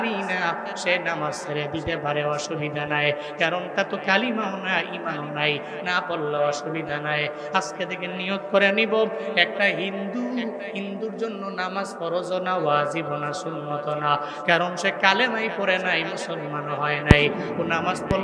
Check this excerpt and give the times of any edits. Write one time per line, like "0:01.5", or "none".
none